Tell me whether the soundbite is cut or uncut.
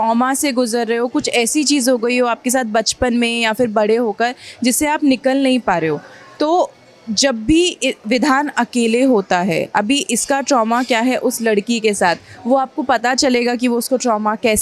uncut